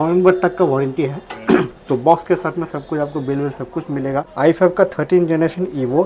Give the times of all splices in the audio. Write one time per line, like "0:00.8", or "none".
0:04.3